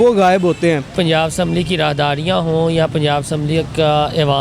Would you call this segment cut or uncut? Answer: cut